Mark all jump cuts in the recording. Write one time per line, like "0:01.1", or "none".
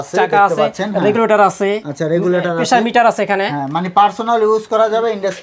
none